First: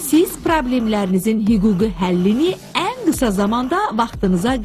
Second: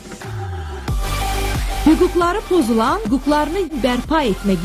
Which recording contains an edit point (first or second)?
first